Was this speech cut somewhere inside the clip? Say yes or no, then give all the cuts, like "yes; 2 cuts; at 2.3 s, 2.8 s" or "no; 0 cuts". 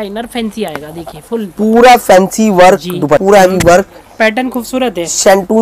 yes; 1 cut; at 3.2 s